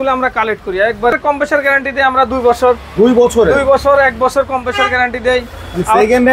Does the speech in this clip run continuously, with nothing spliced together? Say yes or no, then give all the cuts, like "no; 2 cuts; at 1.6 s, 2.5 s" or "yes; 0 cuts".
no; 1 cut; at 1.1 s